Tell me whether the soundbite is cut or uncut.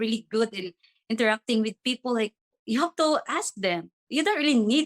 cut